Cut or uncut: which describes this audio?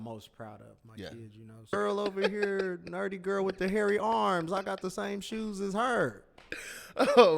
cut